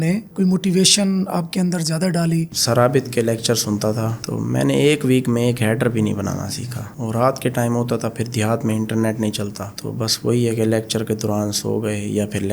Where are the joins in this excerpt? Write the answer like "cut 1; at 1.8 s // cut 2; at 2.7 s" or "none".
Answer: cut 1; at 2.5 s // cut 2; at 6.9 s

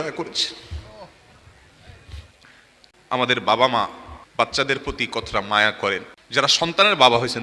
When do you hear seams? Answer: cut 1; at 3.0 s // cut 2; at 4.5 s // cut 3; at 6.2 s

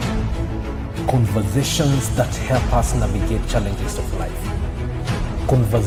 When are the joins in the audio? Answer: none

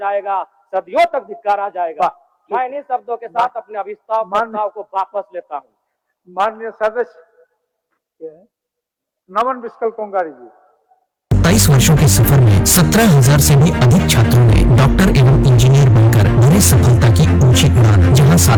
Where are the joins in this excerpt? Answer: none

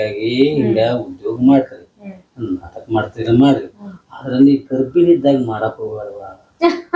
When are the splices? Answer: none

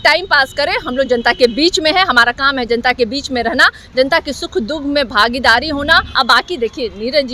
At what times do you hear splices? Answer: cut 1; at 6.1 s

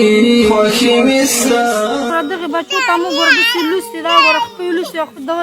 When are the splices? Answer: cut 1; at 2.1 s

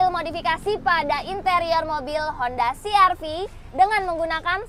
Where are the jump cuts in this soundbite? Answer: none

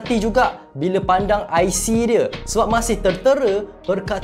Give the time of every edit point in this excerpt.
none

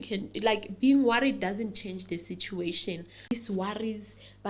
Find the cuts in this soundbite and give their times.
cut 1; at 3.3 s

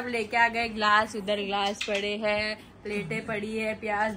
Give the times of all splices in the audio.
none

